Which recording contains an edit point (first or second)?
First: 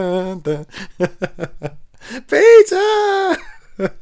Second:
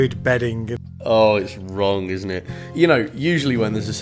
second